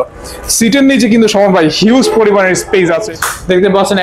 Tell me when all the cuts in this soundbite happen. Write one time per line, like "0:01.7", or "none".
0:03.1